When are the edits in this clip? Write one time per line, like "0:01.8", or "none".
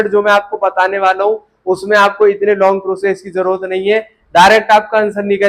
none